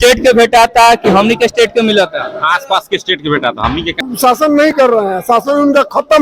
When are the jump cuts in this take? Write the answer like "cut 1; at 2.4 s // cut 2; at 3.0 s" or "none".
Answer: cut 1; at 4.0 s